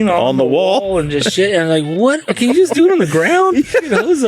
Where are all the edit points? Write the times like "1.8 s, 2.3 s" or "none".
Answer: 2.2 s